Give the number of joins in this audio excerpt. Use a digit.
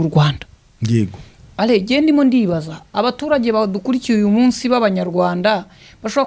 0